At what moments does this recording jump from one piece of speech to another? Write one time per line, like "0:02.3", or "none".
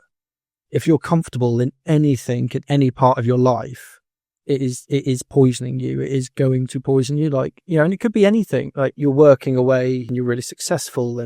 0:09.0
0:10.1